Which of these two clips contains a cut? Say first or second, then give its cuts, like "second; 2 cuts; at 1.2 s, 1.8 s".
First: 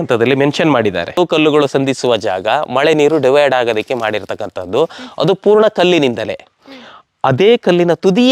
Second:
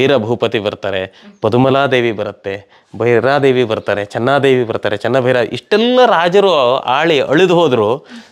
first; 1 cut; at 1.1 s